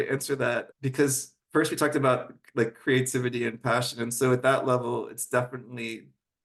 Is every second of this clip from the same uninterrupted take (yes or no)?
yes